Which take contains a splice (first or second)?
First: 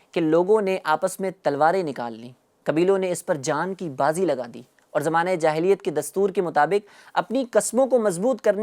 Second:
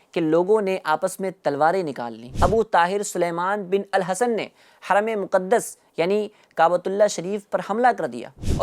second